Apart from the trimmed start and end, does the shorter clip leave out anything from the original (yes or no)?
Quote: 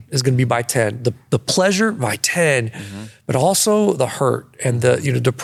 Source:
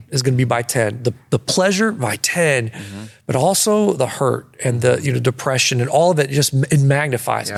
no